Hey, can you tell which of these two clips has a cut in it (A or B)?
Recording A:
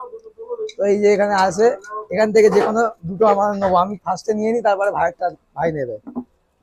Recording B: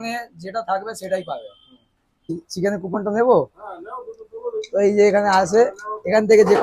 B